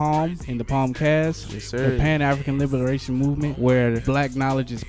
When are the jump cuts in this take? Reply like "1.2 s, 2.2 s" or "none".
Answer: none